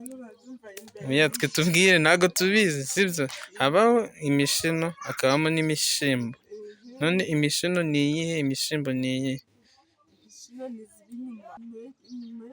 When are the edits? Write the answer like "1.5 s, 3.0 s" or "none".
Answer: 11.6 s